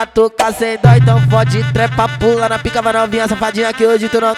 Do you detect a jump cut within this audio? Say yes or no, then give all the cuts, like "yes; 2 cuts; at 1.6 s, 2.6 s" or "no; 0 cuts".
no; 0 cuts